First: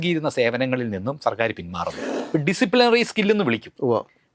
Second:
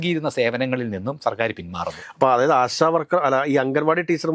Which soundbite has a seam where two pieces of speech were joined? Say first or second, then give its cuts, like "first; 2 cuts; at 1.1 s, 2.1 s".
first; 1 cut; at 2.1 s